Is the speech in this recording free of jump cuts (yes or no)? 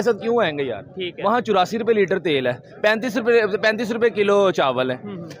yes